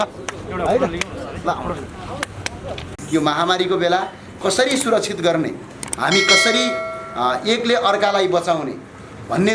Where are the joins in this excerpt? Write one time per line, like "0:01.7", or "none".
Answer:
0:02.9